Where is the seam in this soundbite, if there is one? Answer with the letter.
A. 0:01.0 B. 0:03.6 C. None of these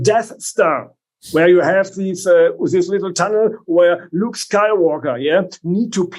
C